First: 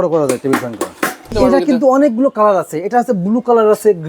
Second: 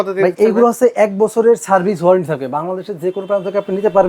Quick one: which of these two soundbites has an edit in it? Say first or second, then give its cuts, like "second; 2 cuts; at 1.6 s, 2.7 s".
first; 1 cut; at 1.4 s